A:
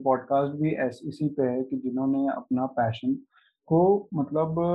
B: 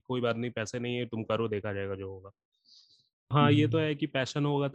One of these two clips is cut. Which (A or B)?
B